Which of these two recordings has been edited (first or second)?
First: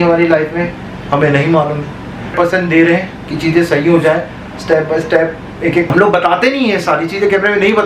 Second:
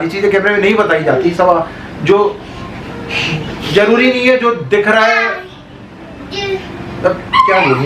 first